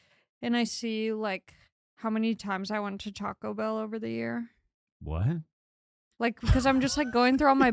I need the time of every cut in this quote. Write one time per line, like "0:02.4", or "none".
none